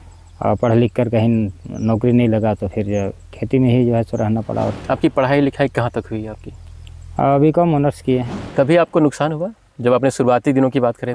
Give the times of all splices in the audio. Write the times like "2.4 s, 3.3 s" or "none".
4.8 s, 8.4 s